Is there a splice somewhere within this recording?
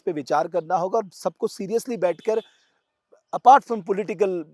no; 0 cuts

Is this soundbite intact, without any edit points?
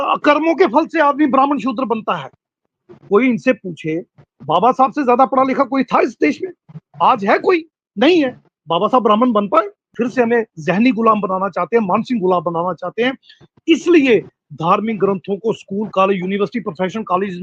no; 1 cut; at 9.9 s

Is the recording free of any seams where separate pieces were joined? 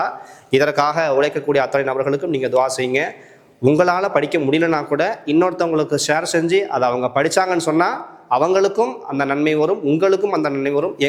yes; 0 cuts

